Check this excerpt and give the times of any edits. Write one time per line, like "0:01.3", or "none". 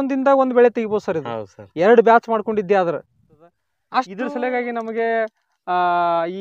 0:03.7